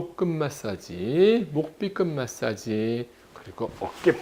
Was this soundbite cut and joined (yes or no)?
no